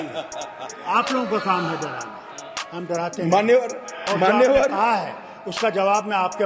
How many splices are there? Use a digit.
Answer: 0